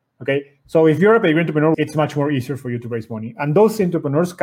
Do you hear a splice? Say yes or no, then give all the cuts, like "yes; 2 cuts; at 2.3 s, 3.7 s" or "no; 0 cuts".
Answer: yes; 1 cut; at 1.7 s